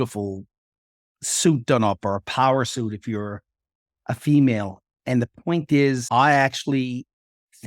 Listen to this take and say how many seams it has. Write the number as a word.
one